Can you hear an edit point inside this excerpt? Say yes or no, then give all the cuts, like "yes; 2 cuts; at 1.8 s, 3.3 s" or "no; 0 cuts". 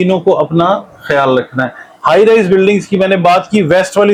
no; 0 cuts